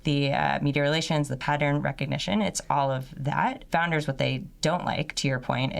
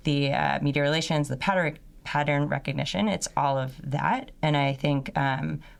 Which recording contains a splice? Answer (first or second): first